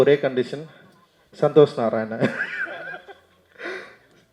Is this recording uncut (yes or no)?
yes